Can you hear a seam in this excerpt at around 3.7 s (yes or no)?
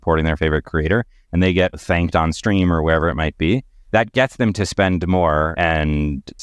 no